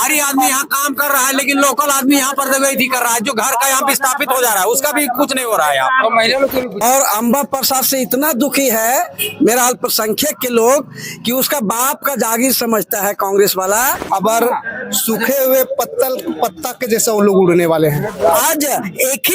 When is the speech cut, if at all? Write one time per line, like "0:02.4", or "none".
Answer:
0:06.8
0:14.0
0:18.4